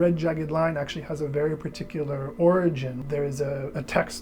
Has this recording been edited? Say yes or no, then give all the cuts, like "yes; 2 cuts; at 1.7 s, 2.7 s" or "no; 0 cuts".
yes; 1 cut; at 3.0 s